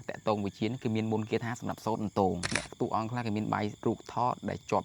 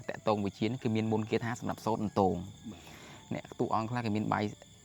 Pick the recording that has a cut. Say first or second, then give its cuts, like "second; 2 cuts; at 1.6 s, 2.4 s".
first; 2 cuts; at 2.6 s, 3.8 s